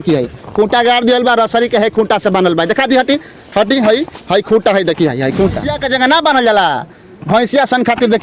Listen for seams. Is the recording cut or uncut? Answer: cut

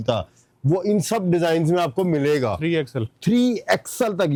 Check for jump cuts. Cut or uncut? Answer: uncut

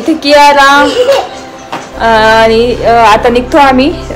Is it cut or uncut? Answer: uncut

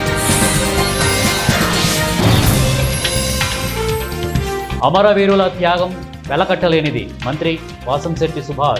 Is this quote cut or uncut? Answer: uncut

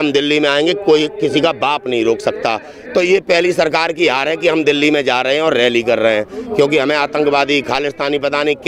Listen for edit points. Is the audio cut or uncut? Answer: uncut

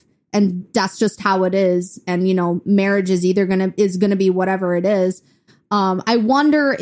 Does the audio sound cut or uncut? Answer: uncut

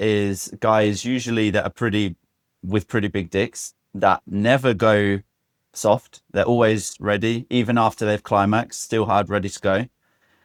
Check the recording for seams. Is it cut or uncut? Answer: uncut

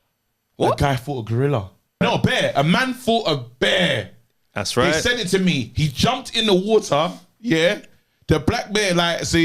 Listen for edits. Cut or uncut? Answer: cut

